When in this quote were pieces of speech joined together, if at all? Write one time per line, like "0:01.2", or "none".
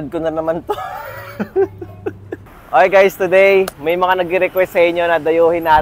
0:02.3